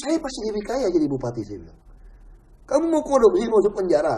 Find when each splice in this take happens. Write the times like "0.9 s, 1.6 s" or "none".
none